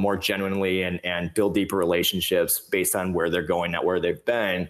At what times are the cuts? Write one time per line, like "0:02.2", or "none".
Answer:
none